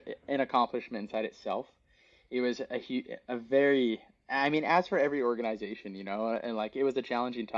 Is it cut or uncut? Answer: uncut